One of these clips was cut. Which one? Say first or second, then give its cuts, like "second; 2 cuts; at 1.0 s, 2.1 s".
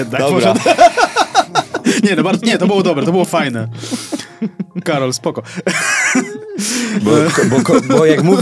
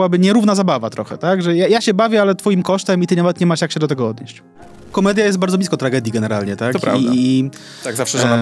second; 1 cut; at 4.9 s